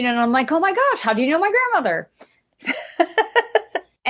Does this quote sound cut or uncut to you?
uncut